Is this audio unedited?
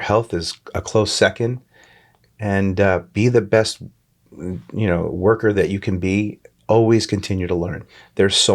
yes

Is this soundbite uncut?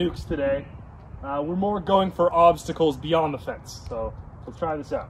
yes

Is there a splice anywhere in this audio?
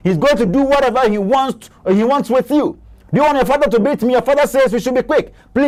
no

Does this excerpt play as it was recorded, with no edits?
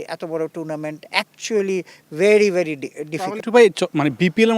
no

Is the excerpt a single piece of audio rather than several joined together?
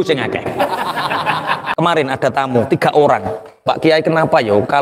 no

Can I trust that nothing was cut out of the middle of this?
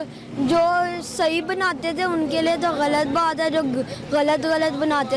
yes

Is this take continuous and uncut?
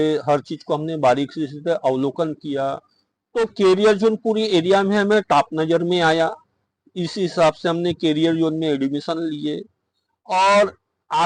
yes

